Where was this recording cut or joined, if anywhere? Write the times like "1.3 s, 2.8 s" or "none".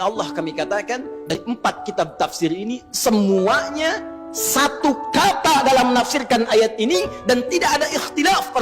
1.4 s